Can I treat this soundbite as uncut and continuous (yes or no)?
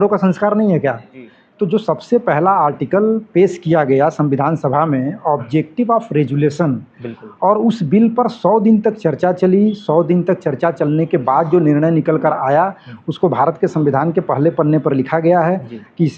no